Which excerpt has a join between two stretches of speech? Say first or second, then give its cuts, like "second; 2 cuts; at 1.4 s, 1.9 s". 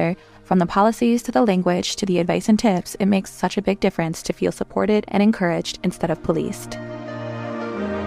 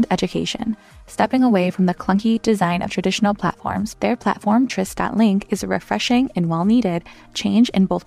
first; 1 cut; at 6.7 s